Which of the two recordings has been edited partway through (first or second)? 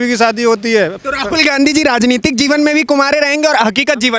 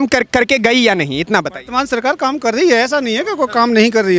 first